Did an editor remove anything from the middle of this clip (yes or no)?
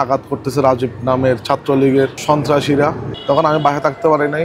yes